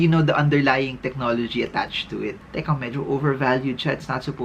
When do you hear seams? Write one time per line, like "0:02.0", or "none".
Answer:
0:02.4